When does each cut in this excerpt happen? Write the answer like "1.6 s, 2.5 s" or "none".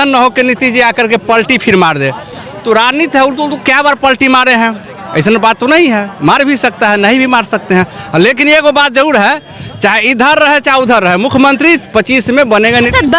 none